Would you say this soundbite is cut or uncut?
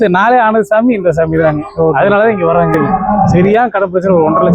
cut